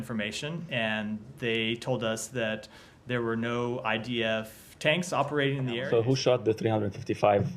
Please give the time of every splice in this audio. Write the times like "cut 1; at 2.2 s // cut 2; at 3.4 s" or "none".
cut 1; at 5.8 s